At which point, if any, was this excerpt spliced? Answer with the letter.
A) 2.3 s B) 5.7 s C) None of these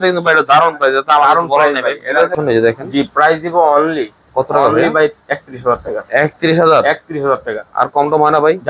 A